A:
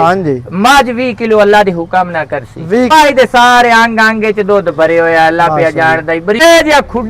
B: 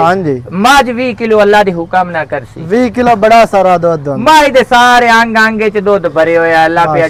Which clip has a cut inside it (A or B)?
A